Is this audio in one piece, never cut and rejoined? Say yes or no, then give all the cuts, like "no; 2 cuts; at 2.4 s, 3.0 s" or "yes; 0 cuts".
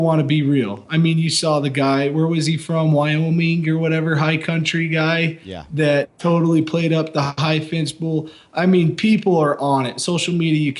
yes; 0 cuts